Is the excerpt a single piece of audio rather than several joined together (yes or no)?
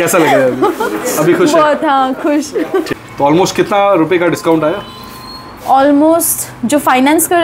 no